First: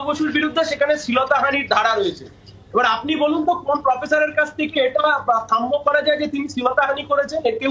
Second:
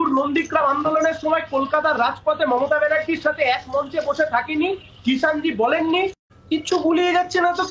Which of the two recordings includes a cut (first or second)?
second